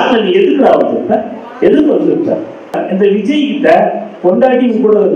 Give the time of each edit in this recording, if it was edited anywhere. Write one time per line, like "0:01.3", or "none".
0:02.8